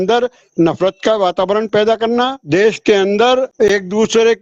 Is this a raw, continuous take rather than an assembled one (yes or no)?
no